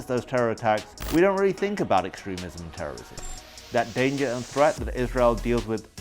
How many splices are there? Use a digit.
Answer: 2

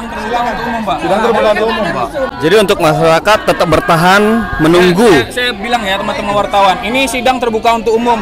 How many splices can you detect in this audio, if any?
1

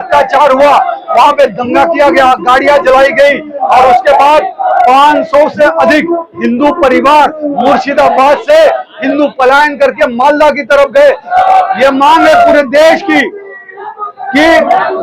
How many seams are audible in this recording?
1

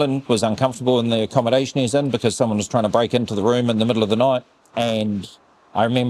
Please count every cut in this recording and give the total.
1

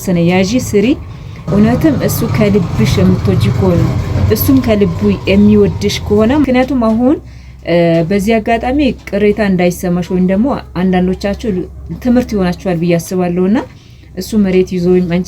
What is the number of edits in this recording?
2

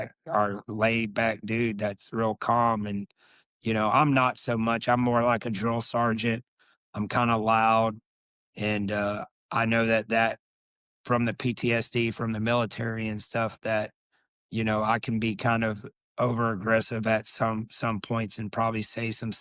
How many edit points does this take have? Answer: 0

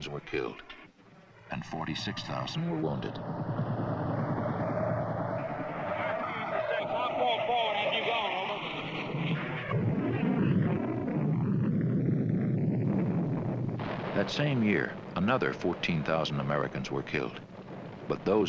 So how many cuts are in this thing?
1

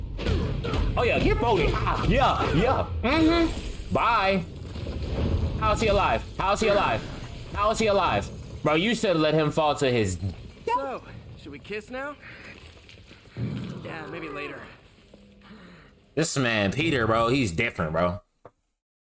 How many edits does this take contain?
0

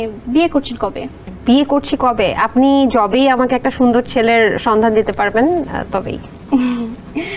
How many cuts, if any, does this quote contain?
0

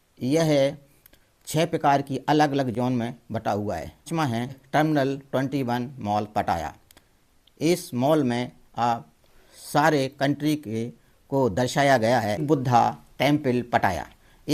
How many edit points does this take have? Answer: 2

